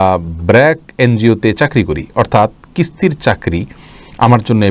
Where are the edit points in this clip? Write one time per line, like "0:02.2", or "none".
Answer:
none